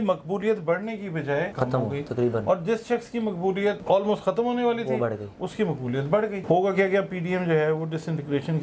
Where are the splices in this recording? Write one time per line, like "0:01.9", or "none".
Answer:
0:01.5
0:03.8
0:06.4

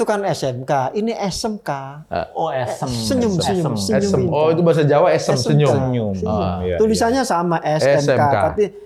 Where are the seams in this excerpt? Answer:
none

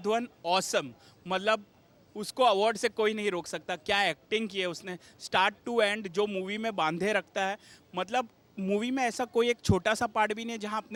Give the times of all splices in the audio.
none

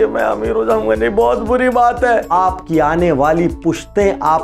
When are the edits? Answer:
0:02.3

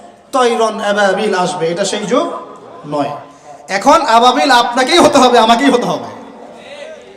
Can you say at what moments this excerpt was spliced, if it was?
none

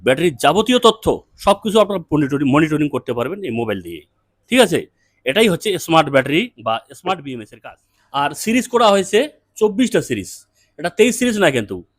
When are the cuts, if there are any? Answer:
0:07.5

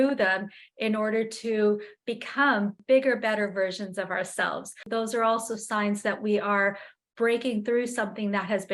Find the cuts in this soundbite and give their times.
0:04.9

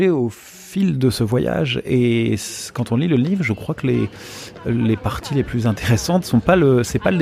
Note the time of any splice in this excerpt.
none

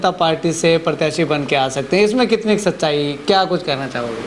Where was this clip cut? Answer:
none

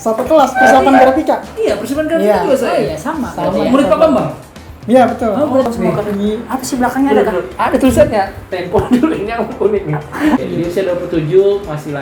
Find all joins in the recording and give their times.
0:05.7
0:10.4

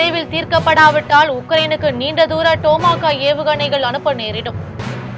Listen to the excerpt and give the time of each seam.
none

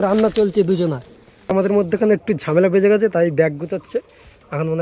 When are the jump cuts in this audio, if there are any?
0:01.5

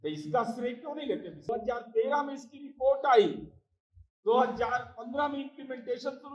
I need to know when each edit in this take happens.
0:01.5

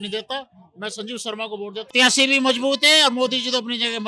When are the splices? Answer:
0:01.9

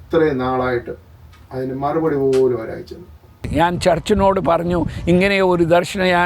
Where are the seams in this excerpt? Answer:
0:03.5

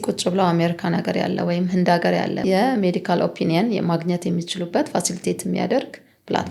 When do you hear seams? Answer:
0:02.4

